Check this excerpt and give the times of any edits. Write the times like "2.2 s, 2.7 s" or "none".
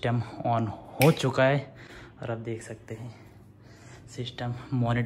none

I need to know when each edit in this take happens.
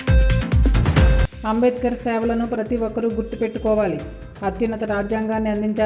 0.9 s

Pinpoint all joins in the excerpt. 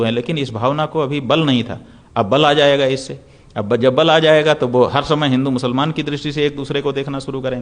none

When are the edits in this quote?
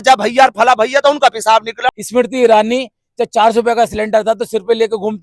1.9 s

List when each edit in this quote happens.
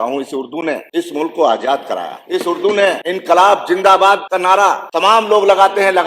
0.8 s, 2.1 s, 3.0 s, 4.5 s

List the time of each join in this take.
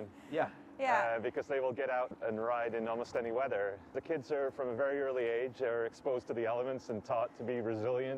2.1 s, 3.9 s

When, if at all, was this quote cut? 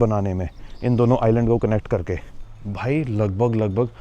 2.4 s

